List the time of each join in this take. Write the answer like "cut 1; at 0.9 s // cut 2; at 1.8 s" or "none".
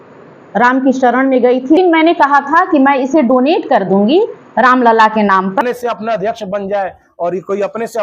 cut 1; at 1.8 s // cut 2; at 5.6 s